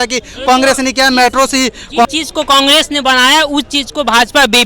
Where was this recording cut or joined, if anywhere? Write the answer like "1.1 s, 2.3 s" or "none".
2.1 s